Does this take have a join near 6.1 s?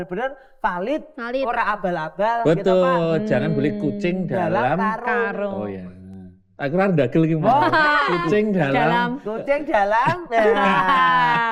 no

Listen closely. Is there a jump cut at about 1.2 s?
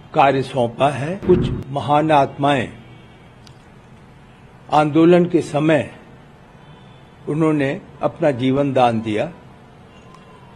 yes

